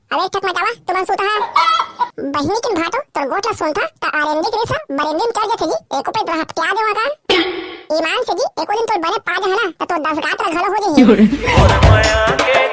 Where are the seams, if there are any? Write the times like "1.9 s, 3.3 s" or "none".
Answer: 11.5 s